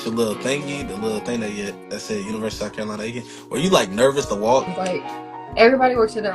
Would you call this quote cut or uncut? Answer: cut